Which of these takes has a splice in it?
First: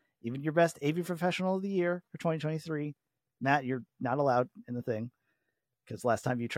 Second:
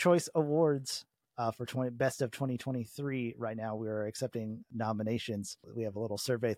second; 2 cuts; at 4.7 s, 5.7 s

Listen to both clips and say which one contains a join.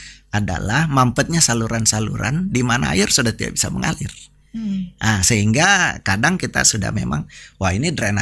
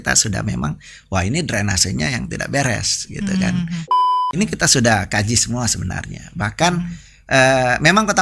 second; 1 cut; at 4.0 s

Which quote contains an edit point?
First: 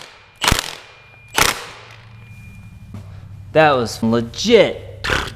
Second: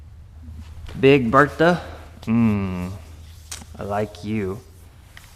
first; 2 cuts; at 3.0 s, 4.0 s

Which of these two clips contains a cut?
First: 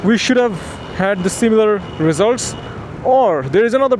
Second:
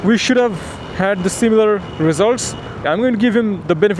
second; 1 cut; at 2.8 s

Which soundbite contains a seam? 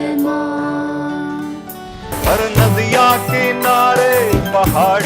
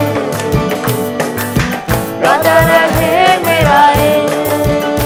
first; 1 cut; at 2.2 s

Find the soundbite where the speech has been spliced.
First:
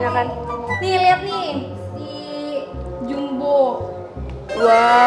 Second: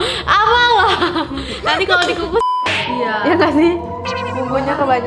second; 1 cut; at 2.7 s

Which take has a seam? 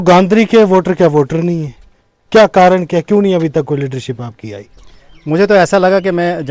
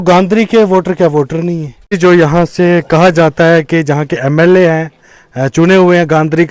second; 1 cut; at 2.0 s

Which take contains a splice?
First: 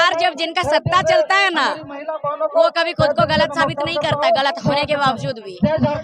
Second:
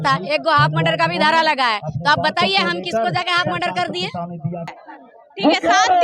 second; 1 cut; at 4.8 s

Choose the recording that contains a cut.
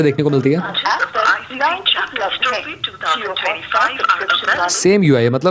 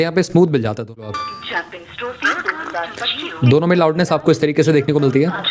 second; 1 cut; at 1.1 s

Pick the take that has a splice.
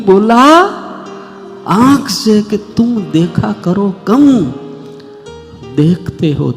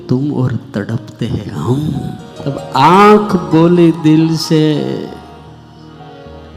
second; 1 cut; at 2.3 s

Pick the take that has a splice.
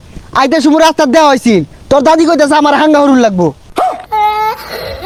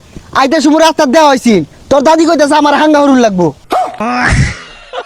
second; 1 cut; at 3.8 s

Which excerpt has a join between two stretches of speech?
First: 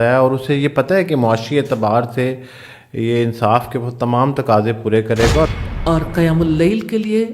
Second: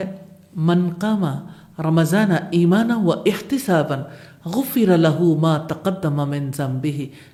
first; 1 cut; at 5.5 s

